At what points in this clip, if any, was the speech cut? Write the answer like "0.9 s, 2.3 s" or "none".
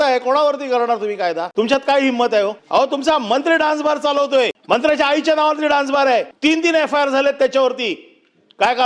1.5 s, 2.6 s, 4.6 s, 6.3 s